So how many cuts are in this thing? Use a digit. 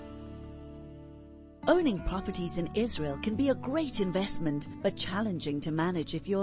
0